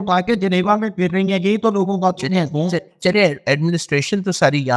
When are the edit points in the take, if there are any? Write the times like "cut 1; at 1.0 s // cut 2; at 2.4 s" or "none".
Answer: none